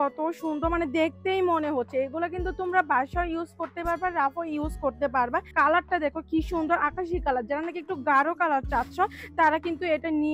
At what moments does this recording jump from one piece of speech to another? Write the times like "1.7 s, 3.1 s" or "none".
5.5 s